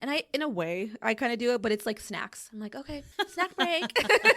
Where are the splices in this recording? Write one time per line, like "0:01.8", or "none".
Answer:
0:03.1